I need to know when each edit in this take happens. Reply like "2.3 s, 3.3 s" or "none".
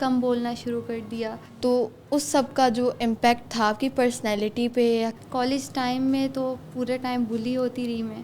1.4 s, 5.2 s